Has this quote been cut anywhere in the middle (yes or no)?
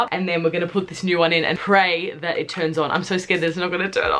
no